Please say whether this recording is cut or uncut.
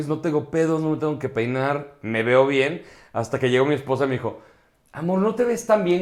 uncut